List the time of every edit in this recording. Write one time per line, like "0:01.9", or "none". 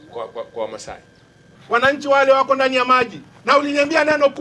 0:01.5